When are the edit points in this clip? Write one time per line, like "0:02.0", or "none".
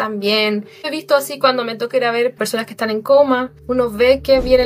0:00.9
0:02.3
0:03.6